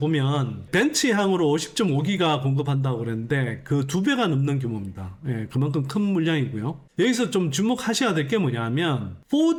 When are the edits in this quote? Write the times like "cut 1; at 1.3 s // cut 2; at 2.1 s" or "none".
none